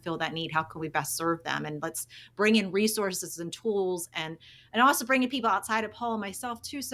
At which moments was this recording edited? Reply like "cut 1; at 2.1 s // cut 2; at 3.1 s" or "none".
none